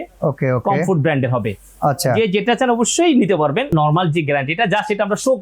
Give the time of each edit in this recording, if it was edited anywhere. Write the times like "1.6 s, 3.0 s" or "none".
3.8 s